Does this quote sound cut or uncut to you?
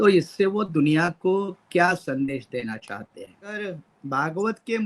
cut